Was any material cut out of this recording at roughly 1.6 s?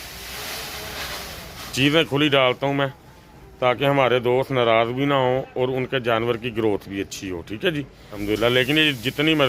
no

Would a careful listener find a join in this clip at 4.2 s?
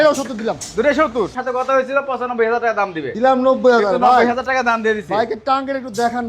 no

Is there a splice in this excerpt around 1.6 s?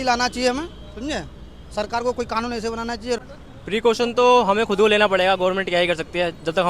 no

